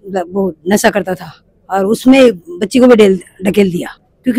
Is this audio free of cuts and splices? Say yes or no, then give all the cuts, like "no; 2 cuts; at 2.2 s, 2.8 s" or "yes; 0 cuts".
yes; 0 cuts